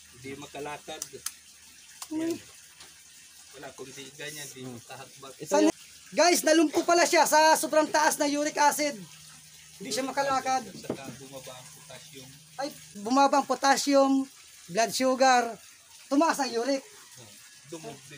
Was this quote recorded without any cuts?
no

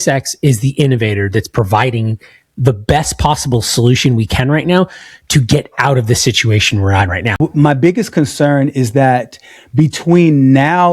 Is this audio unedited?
no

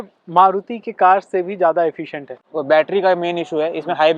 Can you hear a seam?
yes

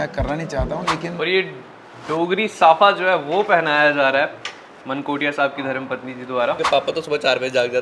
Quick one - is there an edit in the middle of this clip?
yes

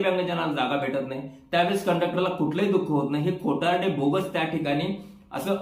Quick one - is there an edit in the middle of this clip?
no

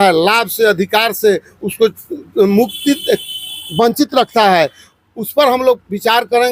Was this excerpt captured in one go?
yes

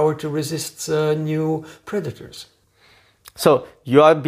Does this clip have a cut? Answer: no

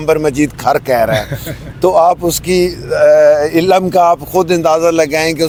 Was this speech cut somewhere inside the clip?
no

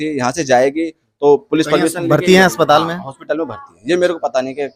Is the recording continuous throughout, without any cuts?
yes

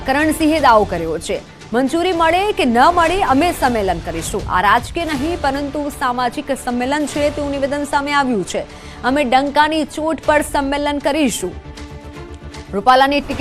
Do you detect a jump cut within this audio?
no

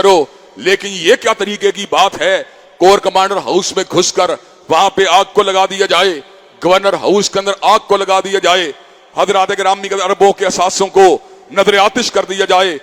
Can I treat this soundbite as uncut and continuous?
yes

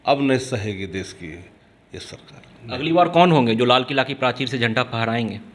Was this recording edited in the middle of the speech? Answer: no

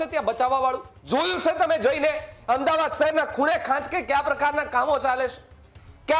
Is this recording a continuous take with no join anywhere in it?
no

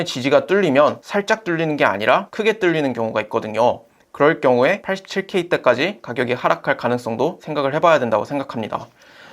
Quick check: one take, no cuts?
no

